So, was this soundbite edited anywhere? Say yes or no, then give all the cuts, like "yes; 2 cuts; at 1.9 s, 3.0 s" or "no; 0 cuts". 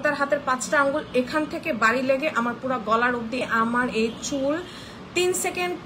yes; 1 cut; at 3.4 s